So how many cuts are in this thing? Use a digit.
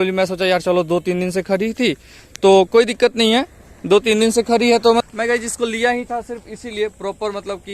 1